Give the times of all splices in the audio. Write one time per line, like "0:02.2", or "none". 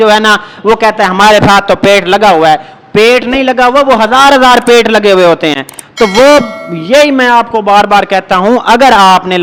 none

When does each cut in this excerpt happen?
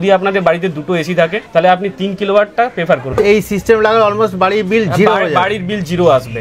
0:03.1

